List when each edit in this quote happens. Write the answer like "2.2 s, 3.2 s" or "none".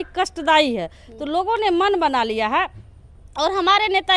none